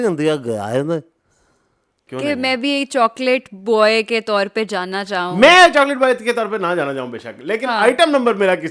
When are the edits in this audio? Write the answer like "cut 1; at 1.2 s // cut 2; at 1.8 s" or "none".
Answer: cut 1; at 2.0 s